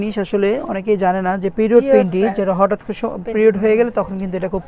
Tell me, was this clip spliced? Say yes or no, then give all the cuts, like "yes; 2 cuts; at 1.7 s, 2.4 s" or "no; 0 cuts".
no; 0 cuts